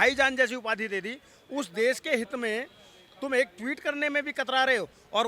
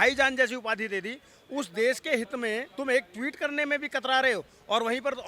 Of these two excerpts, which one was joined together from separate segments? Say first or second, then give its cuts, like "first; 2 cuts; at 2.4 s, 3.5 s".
second; 1 cut; at 2.7 s